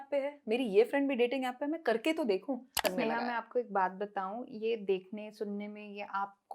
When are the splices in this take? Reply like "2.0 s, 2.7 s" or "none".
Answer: 2.9 s